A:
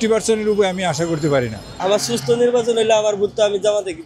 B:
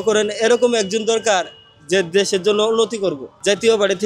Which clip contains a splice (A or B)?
A